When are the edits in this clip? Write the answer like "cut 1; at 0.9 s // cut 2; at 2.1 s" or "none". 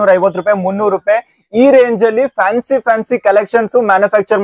none